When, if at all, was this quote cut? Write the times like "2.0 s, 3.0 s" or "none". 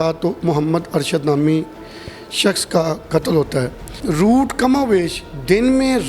3.9 s